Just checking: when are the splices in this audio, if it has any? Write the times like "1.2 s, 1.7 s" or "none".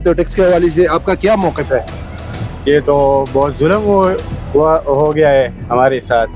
none